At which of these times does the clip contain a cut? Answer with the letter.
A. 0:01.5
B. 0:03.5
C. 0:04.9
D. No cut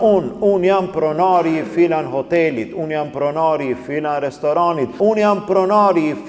C